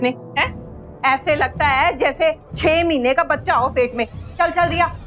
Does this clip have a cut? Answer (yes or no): no